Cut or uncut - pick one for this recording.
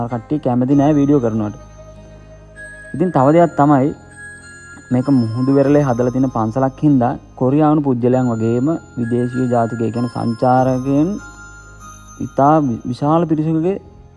uncut